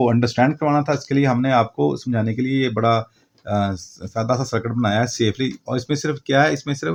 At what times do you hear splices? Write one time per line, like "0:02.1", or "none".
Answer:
none